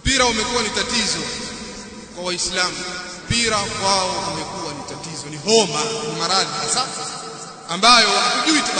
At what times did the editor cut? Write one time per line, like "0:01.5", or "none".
0:03.2